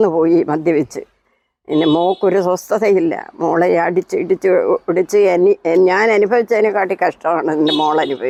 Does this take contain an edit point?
no; 0 cuts

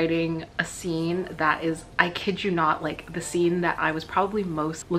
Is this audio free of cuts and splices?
yes; 0 cuts

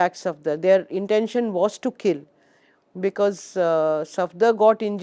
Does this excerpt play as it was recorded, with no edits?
yes; 0 cuts

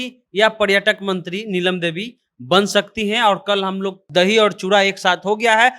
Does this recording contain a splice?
yes; 1 cut; at 4.0 s

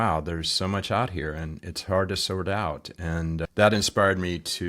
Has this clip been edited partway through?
yes; 1 cut; at 3.4 s

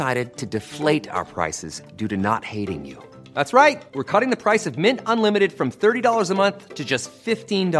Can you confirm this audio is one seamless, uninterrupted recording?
yes; 0 cuts

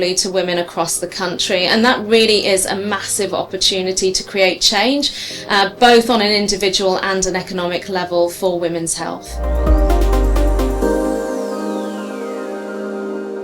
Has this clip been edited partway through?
yes; 1 cut; at 9.4 s

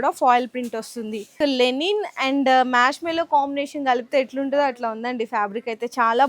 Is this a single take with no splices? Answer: no; 1 cut; at 1.3 s

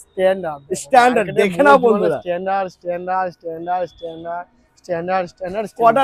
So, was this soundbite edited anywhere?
no; 0 cuts

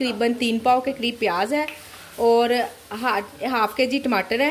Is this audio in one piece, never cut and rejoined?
yes; 0 cuts

